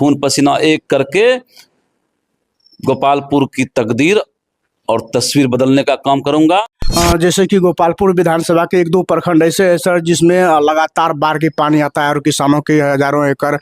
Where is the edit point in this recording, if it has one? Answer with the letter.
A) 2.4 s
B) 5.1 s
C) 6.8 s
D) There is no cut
C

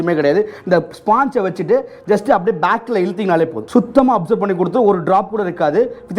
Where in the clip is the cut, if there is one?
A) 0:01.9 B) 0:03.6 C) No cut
B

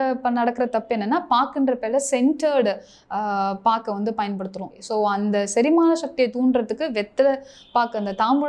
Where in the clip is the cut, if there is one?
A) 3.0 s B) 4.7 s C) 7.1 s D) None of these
B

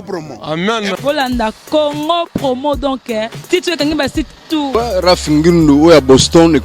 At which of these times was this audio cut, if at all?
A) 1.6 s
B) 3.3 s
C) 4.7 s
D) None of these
C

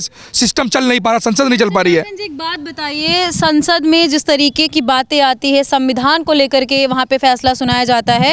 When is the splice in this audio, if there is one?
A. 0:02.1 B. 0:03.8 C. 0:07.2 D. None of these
D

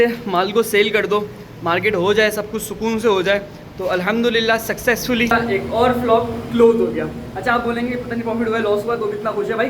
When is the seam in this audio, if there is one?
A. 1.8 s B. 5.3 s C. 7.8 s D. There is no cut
B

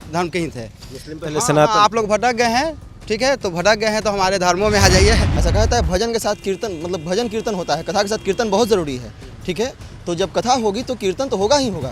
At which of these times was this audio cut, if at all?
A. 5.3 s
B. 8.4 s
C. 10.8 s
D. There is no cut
A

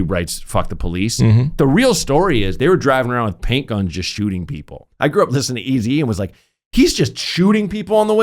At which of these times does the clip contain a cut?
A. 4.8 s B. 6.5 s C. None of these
A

